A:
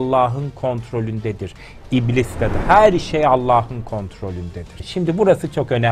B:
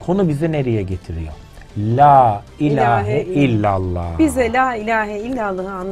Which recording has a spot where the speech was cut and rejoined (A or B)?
A